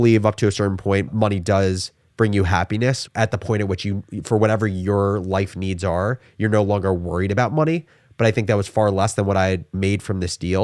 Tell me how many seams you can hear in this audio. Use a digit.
1